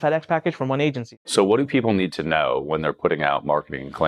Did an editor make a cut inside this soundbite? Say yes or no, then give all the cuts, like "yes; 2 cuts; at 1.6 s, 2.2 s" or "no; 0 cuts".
yes; 1 cut; at 1.2 s